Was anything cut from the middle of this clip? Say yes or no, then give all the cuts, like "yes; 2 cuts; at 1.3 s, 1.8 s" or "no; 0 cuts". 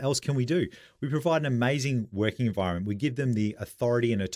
no; 0 cuts